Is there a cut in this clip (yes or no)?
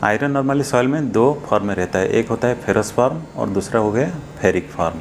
no